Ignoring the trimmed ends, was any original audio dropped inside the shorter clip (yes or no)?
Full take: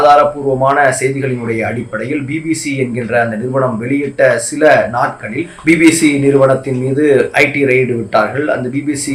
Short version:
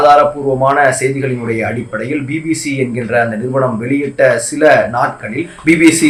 no